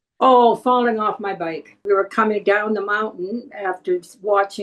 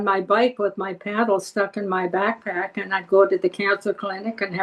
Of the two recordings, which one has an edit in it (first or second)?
first